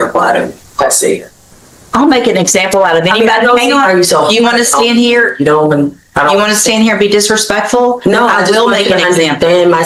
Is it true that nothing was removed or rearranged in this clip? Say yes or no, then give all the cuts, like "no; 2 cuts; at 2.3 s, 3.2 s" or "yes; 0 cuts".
yes; 0 cuts